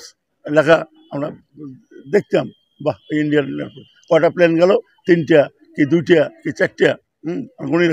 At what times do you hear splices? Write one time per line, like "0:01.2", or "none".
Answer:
none